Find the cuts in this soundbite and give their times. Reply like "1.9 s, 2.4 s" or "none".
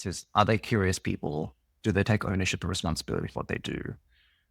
none